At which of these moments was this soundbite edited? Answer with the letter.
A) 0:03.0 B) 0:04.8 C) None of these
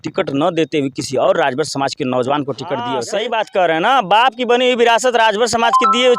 A